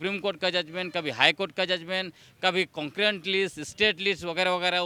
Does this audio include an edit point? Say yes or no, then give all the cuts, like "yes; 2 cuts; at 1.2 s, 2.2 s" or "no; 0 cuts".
no; 0 cuts